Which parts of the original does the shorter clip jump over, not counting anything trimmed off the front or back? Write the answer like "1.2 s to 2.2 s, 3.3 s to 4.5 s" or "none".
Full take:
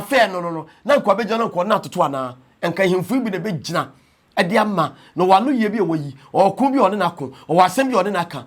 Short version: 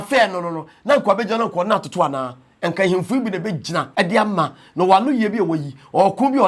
3.9 s to 4.3 s